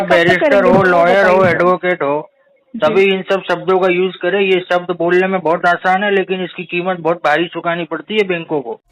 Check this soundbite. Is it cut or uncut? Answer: uncut